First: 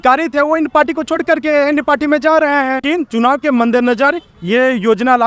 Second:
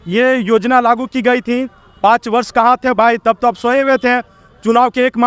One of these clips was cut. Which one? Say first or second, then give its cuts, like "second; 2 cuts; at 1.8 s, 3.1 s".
first; 1 cut; at 2.8 s